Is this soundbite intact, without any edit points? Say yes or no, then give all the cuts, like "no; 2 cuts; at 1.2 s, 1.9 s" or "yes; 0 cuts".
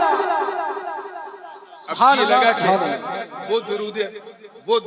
yes; 0 cuts